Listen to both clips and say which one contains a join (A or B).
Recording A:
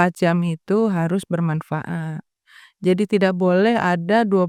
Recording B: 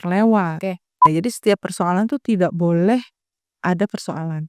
B